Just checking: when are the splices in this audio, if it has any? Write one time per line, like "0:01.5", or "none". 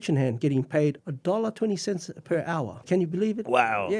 0:01.0
0:02.8